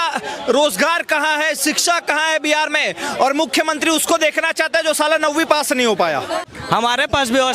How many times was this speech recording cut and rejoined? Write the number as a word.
one